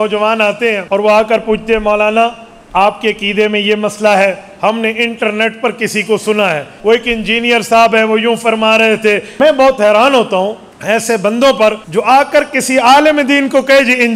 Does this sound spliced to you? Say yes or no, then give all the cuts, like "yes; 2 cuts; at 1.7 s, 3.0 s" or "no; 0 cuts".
yes; 5 cuts; at 0.8 s, 6.7 s, 9.3 s, 10.7 s, 11.8 s